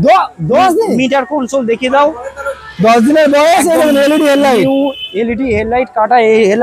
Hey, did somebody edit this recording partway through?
no; 0 cuts

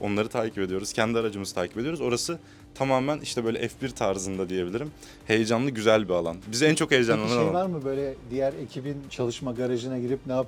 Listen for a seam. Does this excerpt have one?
no; 0 cuts

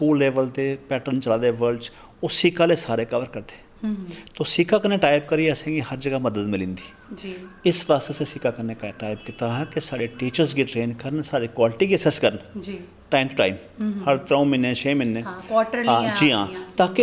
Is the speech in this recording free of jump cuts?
yes; 0 cuts

